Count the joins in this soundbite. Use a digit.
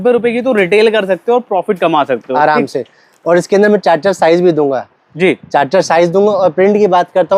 0